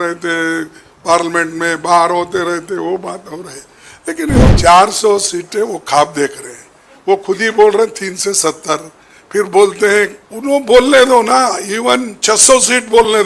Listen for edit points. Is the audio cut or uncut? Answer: cut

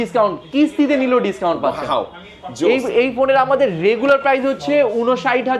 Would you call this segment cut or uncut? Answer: uncut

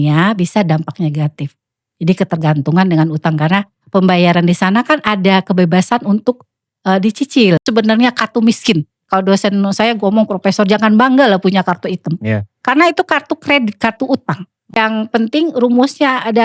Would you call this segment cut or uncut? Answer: cut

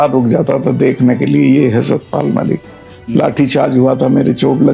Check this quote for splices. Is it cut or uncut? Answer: uncut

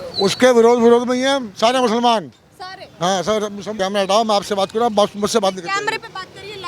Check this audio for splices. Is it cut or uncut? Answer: cut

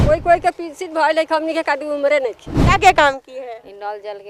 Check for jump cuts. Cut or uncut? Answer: cut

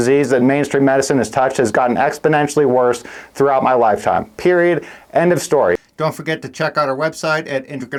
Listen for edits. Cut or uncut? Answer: uncut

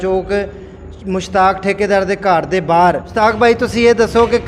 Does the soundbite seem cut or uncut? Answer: cut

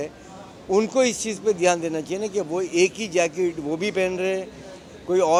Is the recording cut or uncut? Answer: uncut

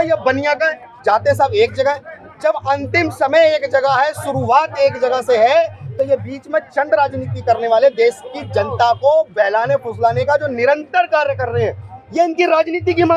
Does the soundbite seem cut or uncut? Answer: uncut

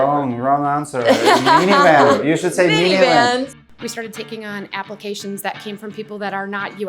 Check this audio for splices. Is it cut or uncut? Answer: cut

